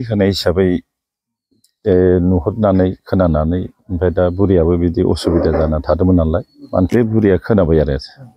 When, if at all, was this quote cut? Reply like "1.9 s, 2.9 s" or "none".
6.9 s